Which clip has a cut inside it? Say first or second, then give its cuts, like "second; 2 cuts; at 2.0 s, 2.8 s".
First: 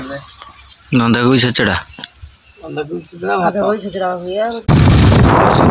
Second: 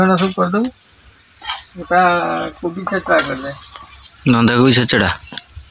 first; 1 cut; at 4.7 s